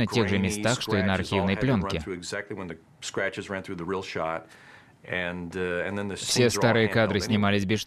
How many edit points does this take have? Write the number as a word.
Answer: one